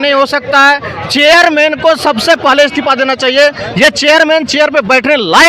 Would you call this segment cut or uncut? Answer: uncut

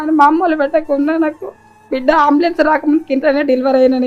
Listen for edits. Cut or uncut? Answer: uncut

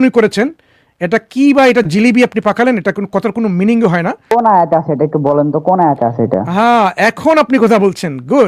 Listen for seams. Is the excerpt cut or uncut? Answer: cut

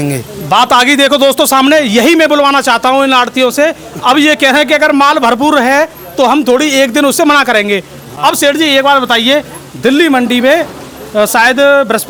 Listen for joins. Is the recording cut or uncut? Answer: uncut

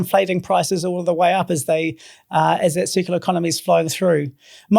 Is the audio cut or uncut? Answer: uncut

